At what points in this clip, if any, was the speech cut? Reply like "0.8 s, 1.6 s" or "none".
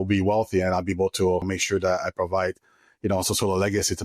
1.4 s